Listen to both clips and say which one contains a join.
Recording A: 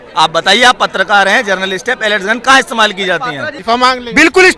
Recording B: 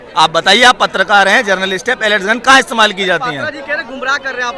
A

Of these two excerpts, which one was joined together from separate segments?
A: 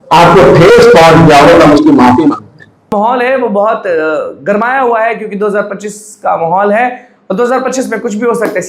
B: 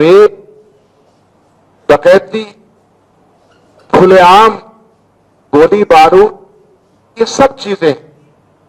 A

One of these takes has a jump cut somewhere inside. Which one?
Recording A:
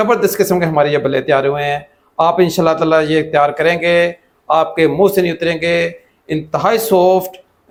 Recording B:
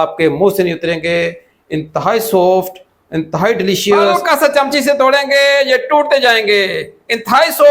B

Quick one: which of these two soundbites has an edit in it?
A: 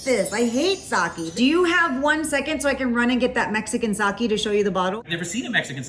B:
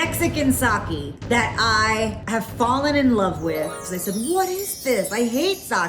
B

